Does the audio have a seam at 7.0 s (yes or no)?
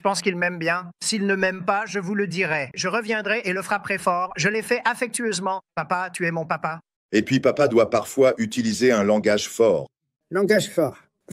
yes